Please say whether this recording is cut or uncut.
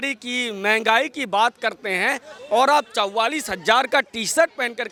uncut